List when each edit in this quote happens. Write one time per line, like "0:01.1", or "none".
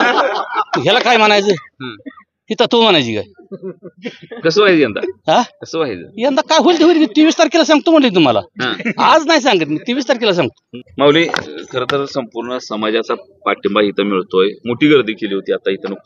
none